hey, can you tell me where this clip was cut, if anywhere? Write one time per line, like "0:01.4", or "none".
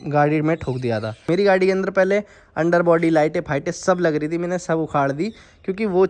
0:01.2